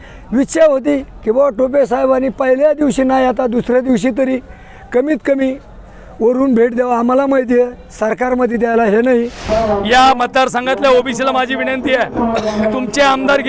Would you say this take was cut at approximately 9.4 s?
yes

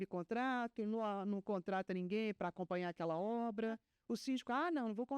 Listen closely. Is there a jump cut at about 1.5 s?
no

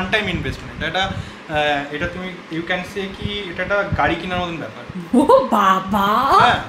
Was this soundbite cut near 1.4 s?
no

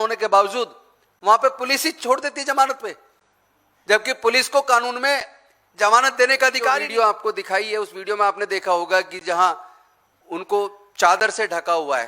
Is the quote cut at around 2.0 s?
no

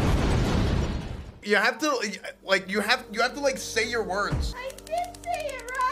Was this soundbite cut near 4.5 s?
yes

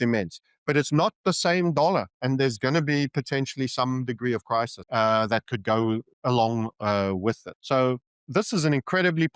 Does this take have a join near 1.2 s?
no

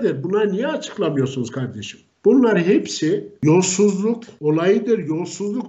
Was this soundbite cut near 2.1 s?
no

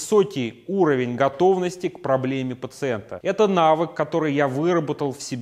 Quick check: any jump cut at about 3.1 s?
yes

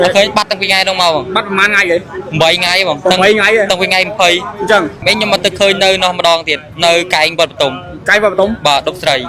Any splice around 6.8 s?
no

